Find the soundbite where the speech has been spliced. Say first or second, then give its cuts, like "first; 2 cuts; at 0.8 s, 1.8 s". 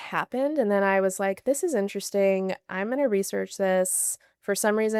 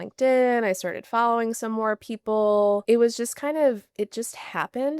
second; 1 cut; at 2.8 s